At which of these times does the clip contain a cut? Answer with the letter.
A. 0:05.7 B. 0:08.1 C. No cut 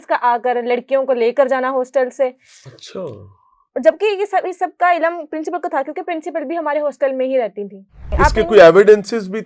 B